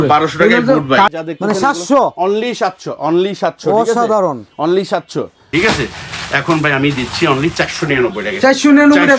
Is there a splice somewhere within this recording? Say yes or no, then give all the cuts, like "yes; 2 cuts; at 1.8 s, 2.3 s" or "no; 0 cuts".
yes; 2 cuts; at 1.1 s, 5.5 s